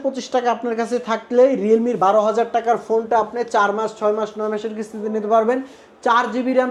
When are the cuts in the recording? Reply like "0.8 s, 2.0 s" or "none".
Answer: none